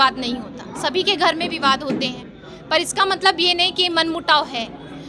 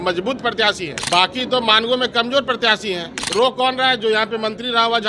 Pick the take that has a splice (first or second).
second